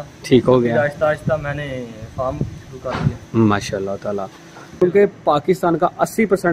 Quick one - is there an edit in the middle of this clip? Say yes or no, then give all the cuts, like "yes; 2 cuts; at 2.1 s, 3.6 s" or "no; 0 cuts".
yes; 1 cut; at 4.8 s